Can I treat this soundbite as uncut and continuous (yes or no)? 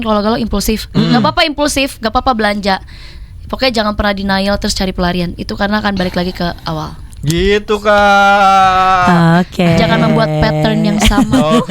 yes